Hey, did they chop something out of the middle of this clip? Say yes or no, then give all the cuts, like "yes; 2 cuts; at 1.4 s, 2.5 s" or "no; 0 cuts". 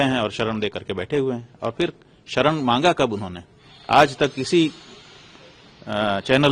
no; 0 cuts